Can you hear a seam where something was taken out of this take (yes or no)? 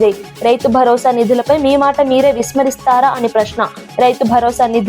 no